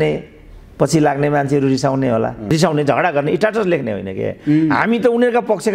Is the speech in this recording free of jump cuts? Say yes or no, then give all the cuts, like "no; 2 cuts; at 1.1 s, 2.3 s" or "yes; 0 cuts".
no; 1 cut; at 2.5 s